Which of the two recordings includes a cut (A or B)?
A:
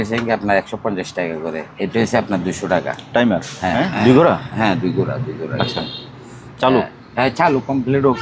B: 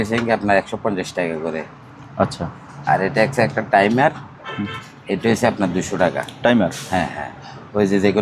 A